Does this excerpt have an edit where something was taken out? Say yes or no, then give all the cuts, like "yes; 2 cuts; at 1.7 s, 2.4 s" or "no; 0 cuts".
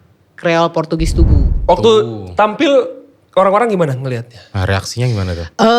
yes; 1 cut; at 1.5 s